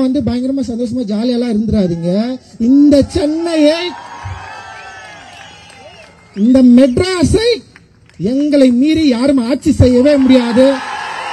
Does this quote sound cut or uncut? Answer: uncut